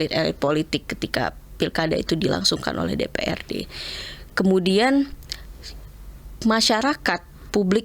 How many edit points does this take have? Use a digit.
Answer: 0